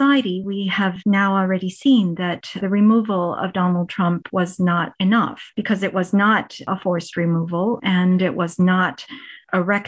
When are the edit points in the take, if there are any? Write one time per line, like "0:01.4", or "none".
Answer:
none